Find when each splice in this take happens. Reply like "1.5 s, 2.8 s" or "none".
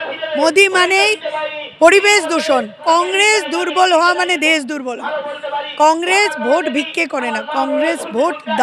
2.8 s